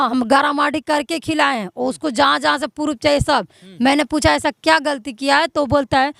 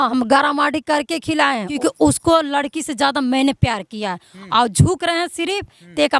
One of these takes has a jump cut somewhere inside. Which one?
second; 1 cut; at 1.8 s

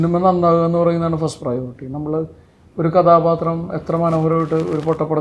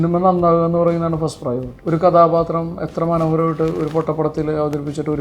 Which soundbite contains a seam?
second; 1 cut; at 1.7 s

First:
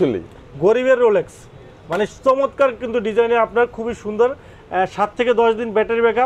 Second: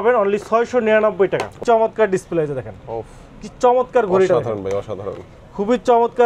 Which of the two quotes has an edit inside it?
second; 1 cut; at 1.6 s

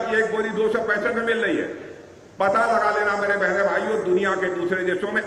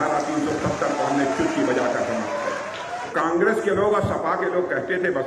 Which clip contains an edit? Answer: second; 1 cut; at 3.1 s

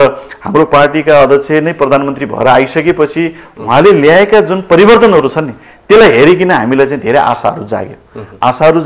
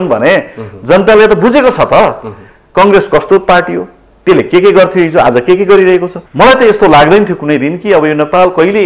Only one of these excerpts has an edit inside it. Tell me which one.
second; 1 cut; at 6.2 s

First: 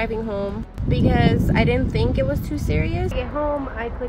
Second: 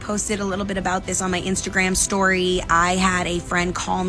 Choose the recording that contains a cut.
first; 1 cut; at 3.1 s

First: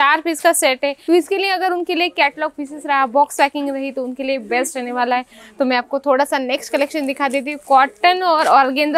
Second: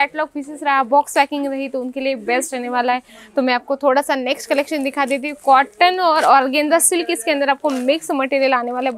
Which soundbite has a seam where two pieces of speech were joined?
first; 1 cut; at 1.0 s

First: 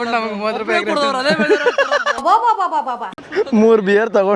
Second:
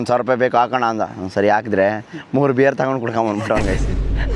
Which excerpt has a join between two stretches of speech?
first; 1 cut; at 3.1 s

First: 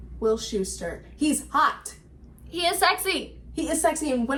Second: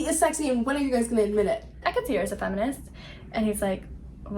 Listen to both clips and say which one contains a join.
second; 1 cut; at 1.7 s

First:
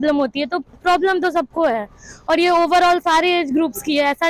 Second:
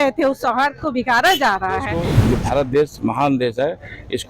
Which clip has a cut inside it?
second; 1 cut; at 2.0 s

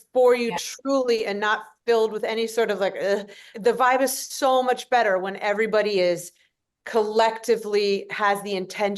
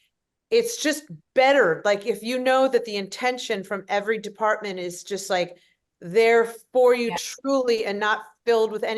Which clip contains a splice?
first; 1 cut; at 3.4 s

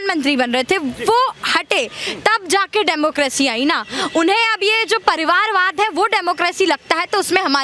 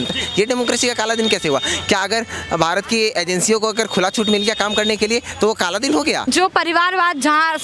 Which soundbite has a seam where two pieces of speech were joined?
second; 1 cut; at 6.2 s

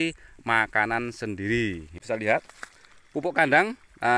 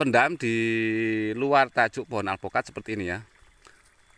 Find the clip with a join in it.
first; 1 cut; at 2.0 s

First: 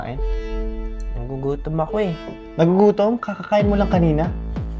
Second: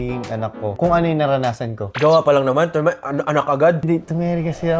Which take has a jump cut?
second; 2 cuts; at 0.7 s, 3.9 s

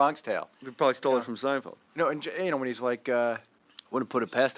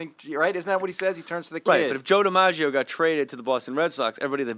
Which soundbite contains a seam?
second; 1 cut; at 2.7 s

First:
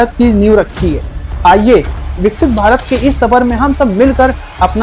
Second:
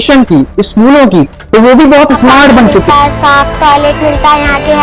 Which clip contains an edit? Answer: second; 1 cut; at 2.9 s

